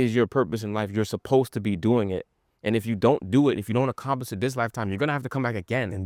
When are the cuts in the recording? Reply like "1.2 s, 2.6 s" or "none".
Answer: none